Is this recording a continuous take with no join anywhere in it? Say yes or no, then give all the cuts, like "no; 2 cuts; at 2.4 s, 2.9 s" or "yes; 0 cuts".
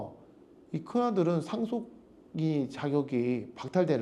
yes; 0 cuts